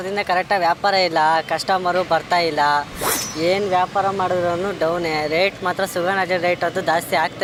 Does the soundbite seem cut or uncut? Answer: uncut